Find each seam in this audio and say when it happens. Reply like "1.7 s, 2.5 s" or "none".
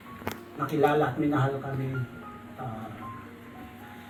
none